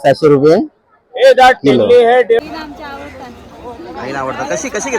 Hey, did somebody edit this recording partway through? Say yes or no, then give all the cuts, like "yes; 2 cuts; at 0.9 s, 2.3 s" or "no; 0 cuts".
yes; 1 cut; at 2.4 s